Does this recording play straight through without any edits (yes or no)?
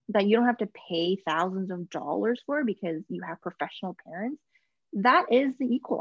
yes